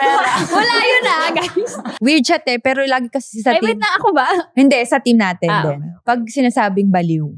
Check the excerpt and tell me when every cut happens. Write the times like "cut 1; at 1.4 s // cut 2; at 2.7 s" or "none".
none